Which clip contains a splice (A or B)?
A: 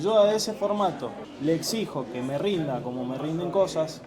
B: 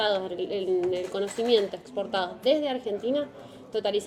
A